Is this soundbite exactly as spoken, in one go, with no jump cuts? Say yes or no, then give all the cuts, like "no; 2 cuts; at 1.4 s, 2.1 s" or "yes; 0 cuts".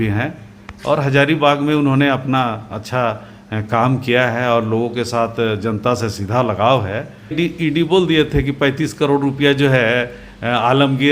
no; 1 cut; at 7.3 s